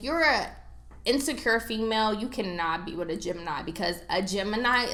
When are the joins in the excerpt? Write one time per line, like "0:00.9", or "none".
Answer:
none